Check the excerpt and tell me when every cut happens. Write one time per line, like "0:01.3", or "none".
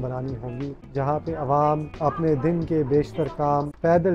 0:01.9